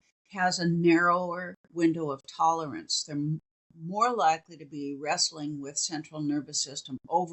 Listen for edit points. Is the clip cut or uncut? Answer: uncut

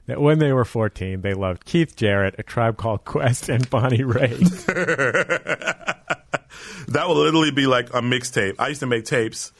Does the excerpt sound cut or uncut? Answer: uncut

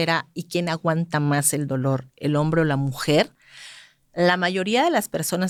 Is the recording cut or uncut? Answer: uncut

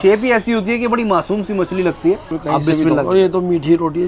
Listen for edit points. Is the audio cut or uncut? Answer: uncut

